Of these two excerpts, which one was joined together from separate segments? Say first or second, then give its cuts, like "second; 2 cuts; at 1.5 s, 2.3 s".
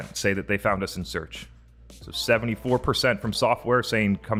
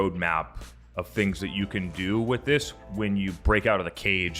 second; 1 cut; at 3.4 s